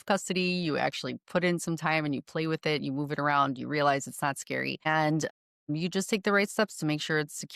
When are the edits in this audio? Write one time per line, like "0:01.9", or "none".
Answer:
none